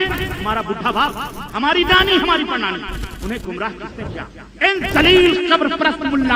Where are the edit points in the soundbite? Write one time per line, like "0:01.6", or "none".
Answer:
none